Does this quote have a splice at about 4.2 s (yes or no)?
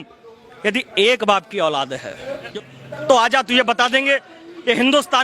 no